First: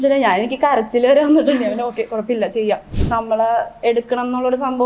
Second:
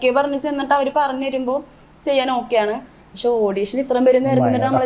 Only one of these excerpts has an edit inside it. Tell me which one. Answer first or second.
first